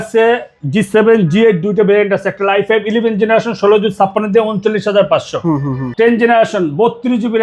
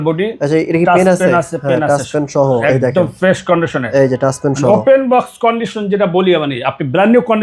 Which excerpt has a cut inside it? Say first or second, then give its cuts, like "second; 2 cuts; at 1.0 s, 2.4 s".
first; 1 cut; at 5.8 s